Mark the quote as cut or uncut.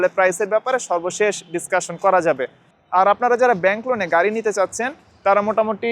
uncut